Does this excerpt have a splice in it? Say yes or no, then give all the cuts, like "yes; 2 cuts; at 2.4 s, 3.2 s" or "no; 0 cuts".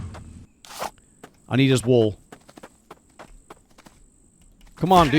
yes; 1 cut; at 4.2 s